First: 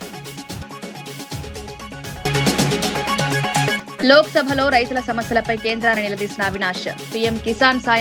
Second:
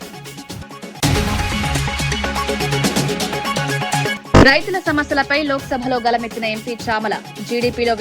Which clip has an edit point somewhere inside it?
second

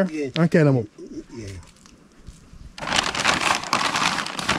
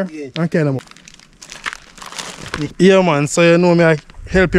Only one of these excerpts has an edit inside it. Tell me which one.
second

